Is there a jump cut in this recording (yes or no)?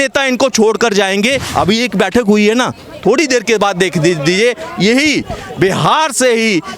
yes